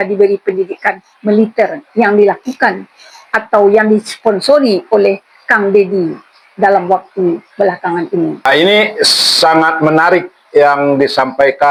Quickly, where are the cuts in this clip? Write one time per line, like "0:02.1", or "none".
none